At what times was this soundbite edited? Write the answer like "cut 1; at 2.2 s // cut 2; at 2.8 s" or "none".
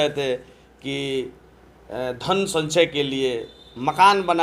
none